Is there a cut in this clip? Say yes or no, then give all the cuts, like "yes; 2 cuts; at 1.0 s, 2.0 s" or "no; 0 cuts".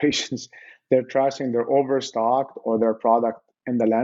no; 0 cuts